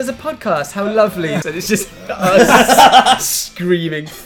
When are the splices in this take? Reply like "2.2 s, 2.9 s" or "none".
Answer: 1.4 s